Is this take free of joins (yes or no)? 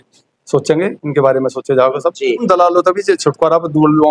no